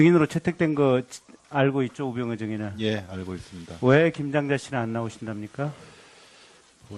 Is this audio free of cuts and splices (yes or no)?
no